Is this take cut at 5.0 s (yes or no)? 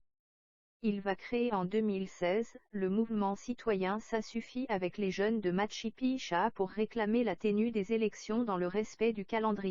no